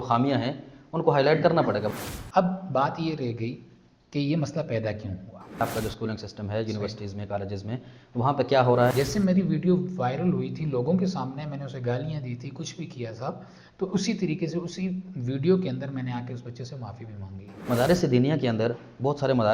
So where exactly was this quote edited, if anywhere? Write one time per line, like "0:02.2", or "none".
0:01.9
0:05.6
0:08.9
0:17.7